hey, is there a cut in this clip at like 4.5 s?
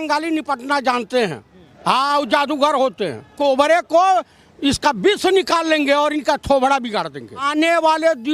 no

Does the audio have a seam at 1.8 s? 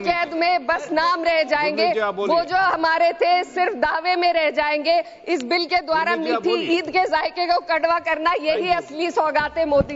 no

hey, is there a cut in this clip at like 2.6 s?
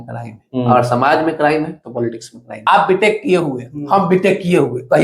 yes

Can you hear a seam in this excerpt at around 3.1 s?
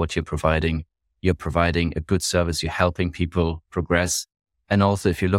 no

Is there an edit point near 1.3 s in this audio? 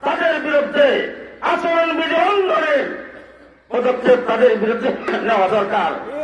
no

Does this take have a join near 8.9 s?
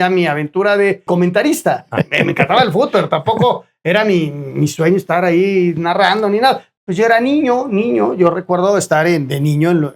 no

